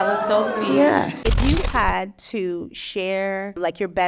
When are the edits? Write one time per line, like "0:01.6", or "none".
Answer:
0:01.2